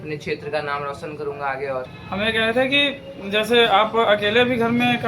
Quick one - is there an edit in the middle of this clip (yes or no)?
yes